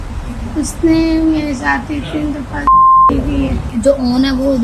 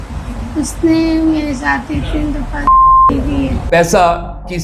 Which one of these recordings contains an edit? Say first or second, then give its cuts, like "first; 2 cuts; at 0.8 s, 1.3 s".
second; 1 cut; at 3.6 s